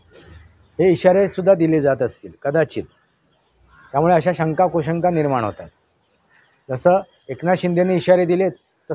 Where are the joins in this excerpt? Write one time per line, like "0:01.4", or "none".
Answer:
none